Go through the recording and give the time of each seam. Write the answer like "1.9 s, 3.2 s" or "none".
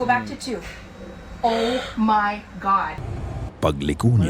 3.0 s